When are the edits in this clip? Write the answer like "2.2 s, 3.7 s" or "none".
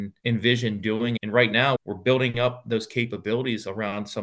1.2 s